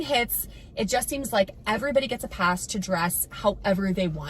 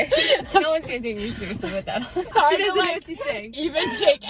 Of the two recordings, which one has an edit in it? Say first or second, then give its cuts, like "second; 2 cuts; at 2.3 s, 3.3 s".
second; 1 cut; at 2.3 s